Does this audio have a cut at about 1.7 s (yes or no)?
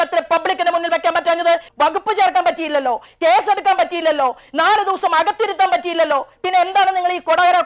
yes